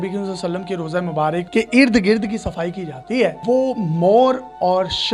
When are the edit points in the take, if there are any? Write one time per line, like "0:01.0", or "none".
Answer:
0:01.5
0:03.4